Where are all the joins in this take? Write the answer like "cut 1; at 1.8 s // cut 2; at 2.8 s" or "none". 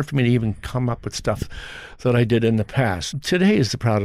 cut 1; at 3.1 s

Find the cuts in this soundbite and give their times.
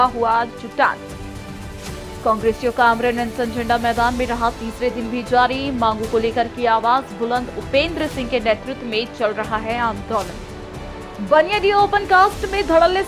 none

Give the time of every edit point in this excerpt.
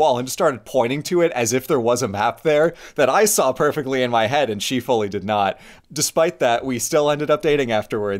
cut 1; at 5.7 s

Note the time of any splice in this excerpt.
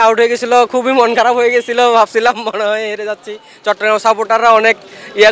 none

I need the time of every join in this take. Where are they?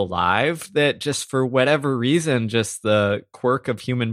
none

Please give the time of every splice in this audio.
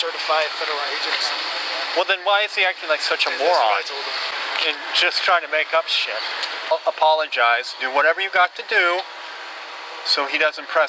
cut 1; at 4.3 s // cut 2; at 6.7 s

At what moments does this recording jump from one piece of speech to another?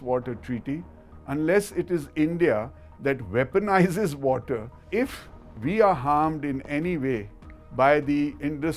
cut 1; at 4.8 s

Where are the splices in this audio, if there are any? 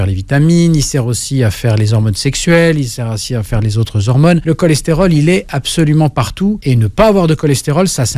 cut 1; at 4.4 s // cut 2; at 6.6 s

